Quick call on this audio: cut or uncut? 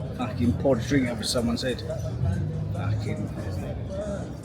uncut